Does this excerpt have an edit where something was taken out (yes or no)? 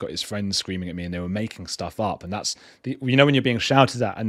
no